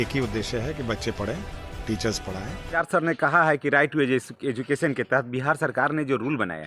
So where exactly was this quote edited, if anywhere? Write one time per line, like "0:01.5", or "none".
0:02.6